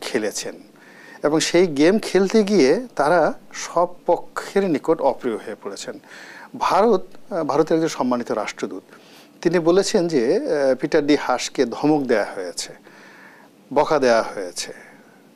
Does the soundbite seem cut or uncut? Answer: uncut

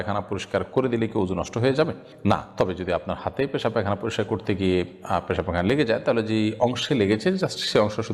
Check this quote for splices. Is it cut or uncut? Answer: uncut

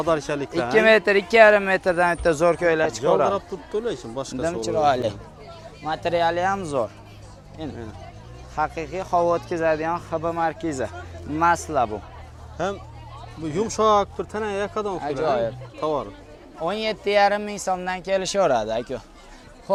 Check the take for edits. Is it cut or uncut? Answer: uncut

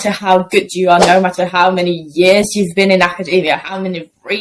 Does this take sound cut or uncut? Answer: uncut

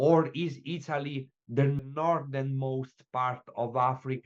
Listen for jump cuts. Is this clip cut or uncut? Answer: cut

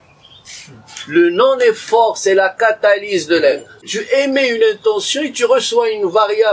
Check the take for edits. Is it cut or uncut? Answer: cut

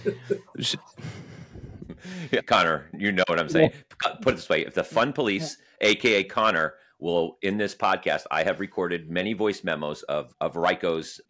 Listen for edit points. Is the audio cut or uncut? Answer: uncut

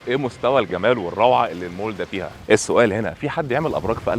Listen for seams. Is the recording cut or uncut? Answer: cut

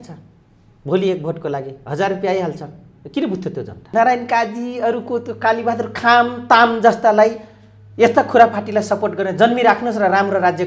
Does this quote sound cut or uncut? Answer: cut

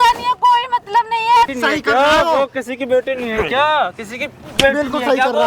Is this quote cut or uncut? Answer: cut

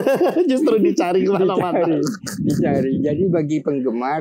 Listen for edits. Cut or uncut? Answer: uncut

